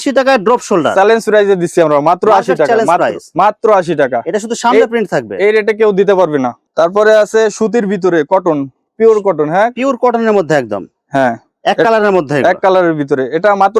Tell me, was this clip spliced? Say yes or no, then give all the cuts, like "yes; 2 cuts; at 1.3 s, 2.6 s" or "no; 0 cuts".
no; 0 cuts